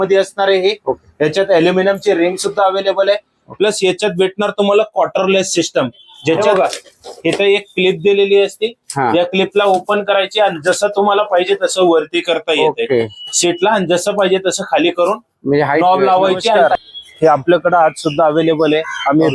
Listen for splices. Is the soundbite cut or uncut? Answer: cut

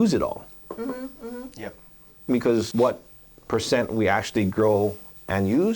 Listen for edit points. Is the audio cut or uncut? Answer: cut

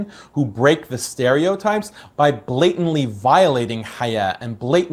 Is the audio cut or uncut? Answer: uncut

